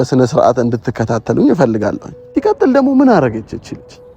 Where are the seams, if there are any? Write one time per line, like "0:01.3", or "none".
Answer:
0:02.1